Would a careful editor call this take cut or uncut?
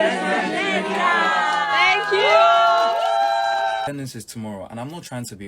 cut